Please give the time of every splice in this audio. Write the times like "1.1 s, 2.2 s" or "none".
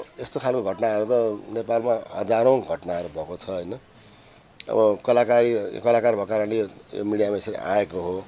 none